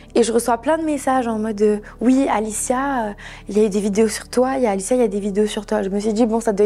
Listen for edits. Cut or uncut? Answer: uncut